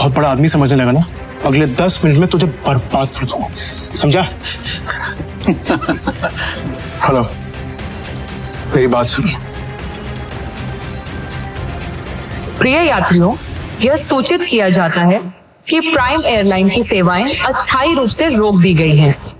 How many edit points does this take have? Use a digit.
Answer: 3